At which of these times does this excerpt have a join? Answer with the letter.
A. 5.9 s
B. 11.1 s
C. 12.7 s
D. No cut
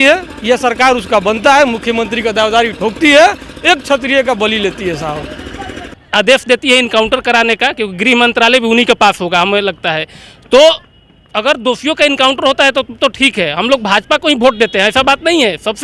A